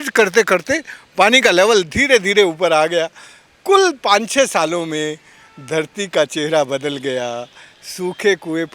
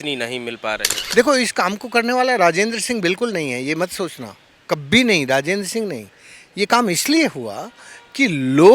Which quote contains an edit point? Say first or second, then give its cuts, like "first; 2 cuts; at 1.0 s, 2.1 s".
second; 1 cut; at 1.0 s